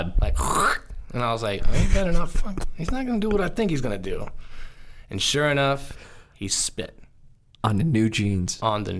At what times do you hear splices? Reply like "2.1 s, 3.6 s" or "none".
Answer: none

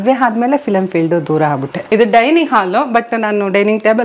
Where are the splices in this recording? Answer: 1.8 s

